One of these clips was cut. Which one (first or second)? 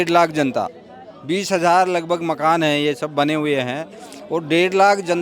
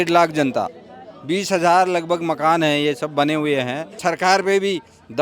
second